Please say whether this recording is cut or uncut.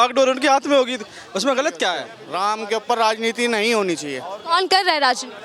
cut